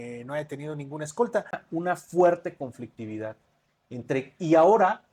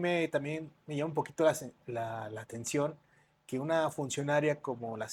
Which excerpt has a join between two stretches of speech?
first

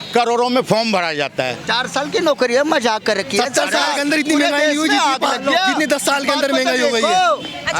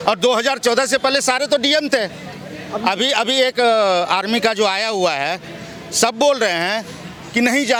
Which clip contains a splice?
first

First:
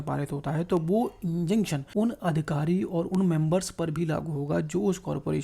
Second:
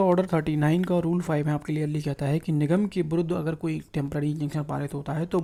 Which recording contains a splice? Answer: first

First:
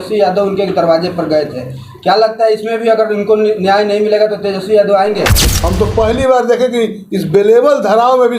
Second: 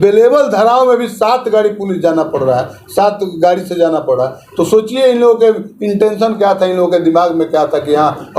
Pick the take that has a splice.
first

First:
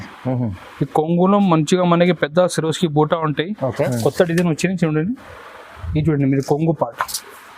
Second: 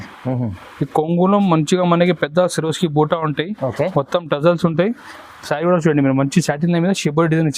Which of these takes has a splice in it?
first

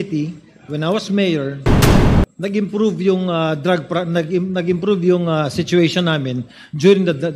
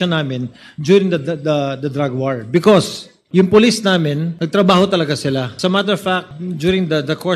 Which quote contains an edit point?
second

